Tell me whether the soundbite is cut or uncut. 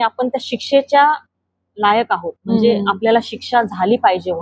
uncut